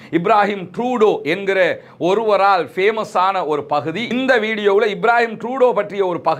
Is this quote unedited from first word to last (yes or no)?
yes